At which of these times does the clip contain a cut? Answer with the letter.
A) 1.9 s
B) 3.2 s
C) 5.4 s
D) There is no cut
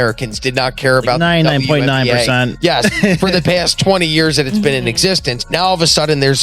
C